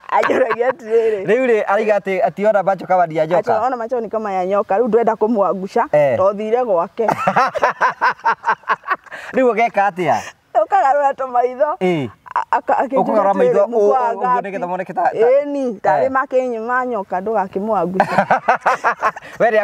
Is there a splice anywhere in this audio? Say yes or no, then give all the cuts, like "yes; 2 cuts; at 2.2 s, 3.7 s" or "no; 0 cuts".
no; 0 cuts